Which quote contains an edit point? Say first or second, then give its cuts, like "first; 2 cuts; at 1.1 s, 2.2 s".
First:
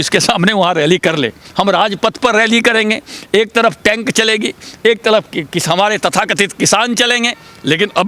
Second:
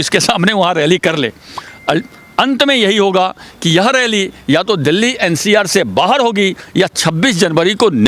first; 1 cut; at 1.4 s